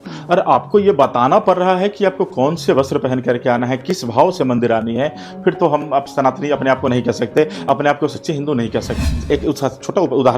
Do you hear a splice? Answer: yes; 1 cut; at 9.0 s

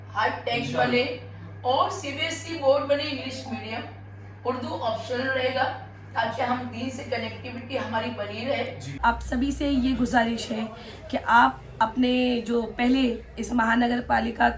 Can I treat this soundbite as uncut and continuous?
no; 1 cut; at 9.0 s

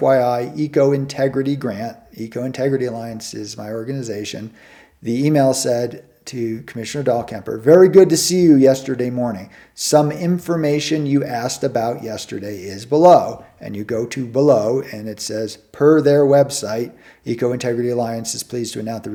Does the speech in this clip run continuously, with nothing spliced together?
yes; 0 cuts

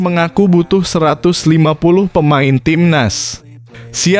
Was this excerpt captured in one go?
yes; 0 cuts

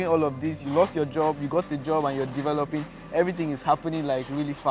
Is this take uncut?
yes; 0 cuts

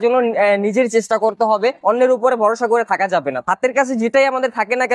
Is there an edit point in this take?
no; 0 cuts

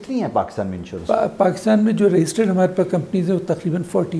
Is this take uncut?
yes; 0 cuts

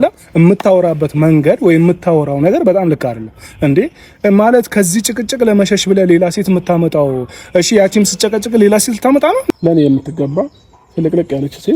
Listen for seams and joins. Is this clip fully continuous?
no; 1 cut; at 9.5 s

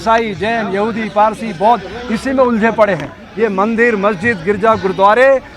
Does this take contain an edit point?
yes; 1 cut; at 3.2 s

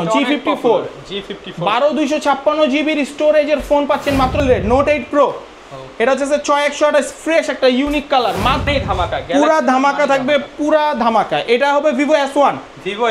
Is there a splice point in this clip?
yes; 2 cuts; at 4.4 s, 8.7 s

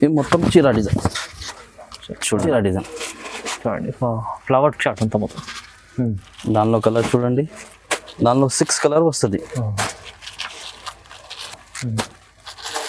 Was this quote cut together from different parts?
yes; 1 cut; at 2.5 s

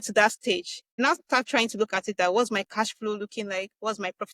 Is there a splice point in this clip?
yes; 1 cut; at 1.0 s

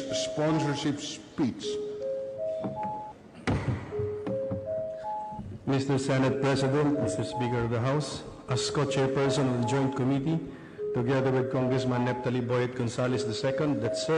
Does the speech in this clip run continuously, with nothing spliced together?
no; 1 cut; at 8.2 s

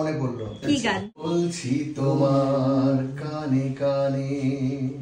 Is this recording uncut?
no; 1 cut; at 1.2 s

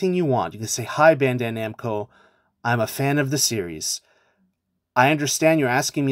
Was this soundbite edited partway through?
no; 0 cuts

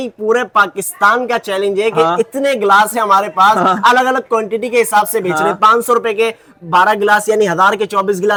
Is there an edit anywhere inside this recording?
no; 0 cuts

